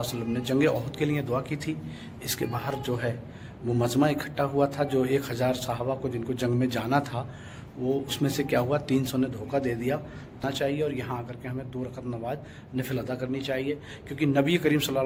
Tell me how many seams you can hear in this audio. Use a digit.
0